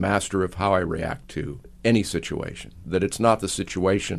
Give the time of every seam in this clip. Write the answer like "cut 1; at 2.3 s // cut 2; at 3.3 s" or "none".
cut 1; at 1.6 s // cut 2; at 2.8 s